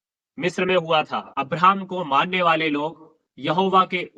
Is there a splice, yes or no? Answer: yes